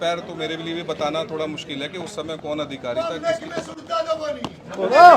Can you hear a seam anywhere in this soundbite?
no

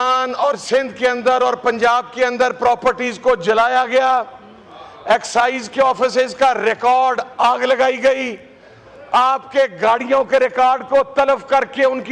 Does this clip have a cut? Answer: no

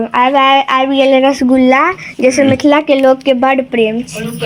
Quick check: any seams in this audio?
no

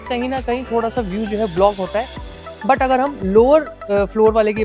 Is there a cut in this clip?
no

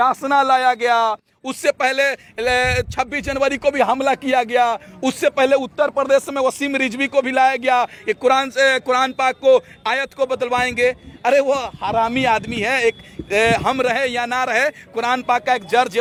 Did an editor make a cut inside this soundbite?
no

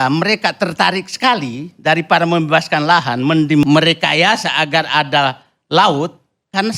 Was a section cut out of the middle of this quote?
yes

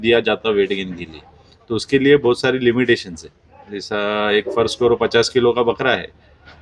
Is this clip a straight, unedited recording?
yes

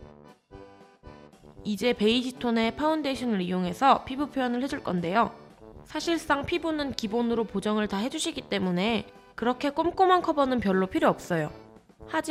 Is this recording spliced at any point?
no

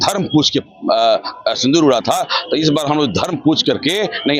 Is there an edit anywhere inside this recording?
no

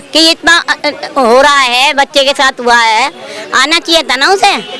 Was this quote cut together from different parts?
no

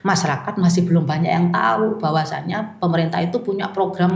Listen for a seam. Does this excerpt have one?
no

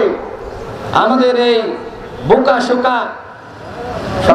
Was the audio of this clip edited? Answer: no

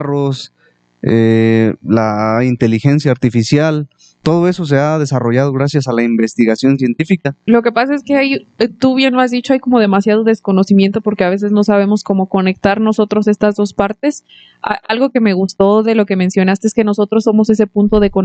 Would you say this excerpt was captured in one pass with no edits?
no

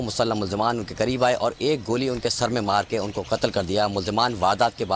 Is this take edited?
no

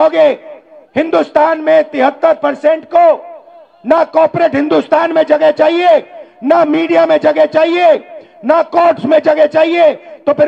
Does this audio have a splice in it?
no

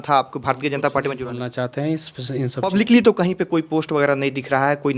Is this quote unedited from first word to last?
no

